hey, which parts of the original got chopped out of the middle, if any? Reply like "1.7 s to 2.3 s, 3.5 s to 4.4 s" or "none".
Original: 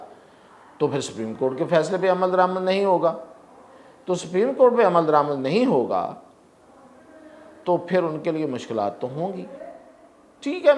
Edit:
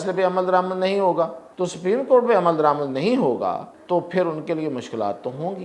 3.3 s to 3.9 s, 6.2 s to 7.5 s